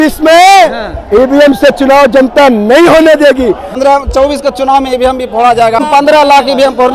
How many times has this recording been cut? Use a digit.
2